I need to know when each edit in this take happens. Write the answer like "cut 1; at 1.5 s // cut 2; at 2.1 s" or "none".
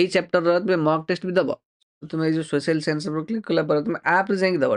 cut 1; at 1.7 s